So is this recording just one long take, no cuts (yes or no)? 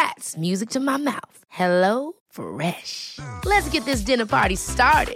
yes